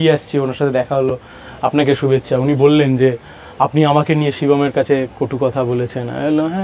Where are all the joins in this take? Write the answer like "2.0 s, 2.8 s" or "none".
none